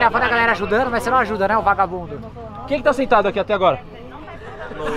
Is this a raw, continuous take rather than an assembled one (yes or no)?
no